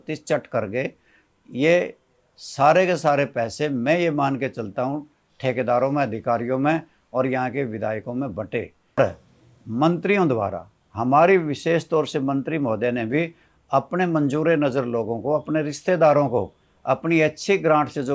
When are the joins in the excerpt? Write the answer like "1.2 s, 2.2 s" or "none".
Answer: 9.0 s